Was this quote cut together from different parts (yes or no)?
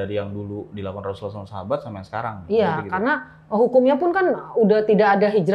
no